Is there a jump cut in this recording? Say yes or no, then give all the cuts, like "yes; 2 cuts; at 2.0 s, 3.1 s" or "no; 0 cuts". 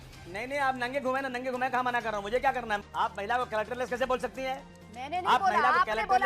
yes; 1 cut; at 2.8 s